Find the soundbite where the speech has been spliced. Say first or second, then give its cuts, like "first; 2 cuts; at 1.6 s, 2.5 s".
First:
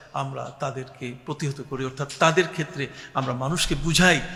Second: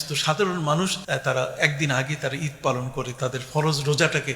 second; 1 cut; at 1.0 s